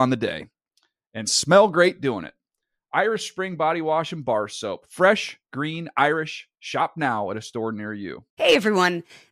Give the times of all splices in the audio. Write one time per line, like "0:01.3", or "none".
0:08.2